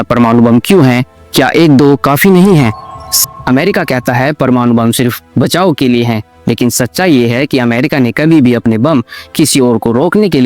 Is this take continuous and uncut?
no; 1 cut; at 3.1 s

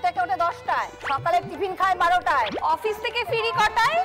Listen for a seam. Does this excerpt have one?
no; 0 cuts

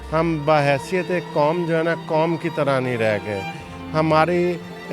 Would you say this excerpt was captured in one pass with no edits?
yes; 0 cuts

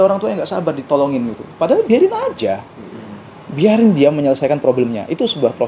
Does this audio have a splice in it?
no; 0 cuts

